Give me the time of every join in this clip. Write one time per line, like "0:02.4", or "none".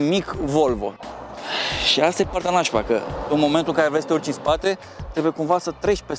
0:01.1